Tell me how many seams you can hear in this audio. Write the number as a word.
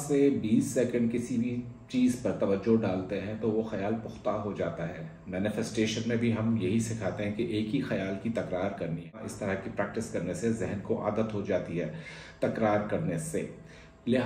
one